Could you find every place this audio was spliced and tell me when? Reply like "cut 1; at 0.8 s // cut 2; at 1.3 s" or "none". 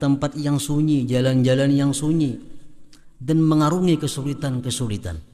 none